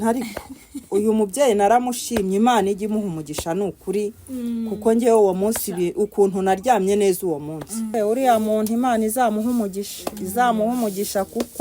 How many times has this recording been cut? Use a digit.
1